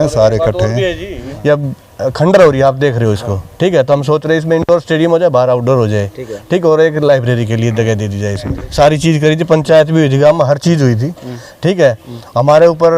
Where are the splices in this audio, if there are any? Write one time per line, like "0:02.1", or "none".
0:01.2
0:08.6